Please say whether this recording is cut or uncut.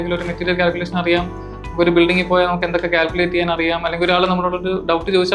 uncut